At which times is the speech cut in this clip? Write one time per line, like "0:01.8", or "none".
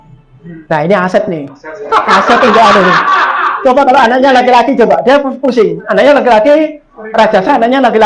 none

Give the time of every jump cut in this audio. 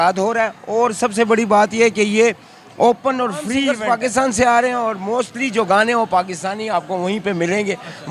0:03.7

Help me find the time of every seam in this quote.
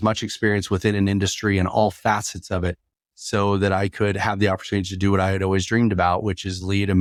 none

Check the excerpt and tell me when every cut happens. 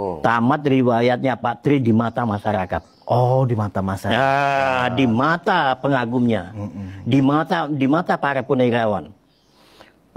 none

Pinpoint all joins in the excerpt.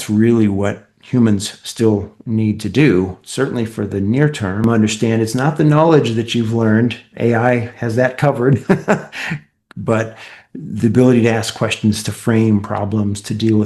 0:04.6

